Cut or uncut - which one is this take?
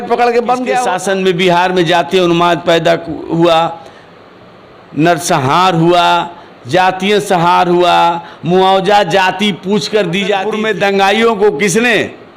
cut